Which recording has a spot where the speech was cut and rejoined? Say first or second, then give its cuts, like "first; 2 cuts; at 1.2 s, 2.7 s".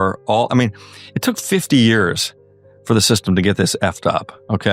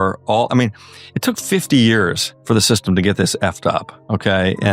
second; 1 cut; at 2.3 s